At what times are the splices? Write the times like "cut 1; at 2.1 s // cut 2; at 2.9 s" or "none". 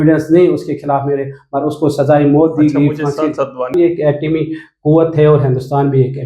cut 1; at 3.7 s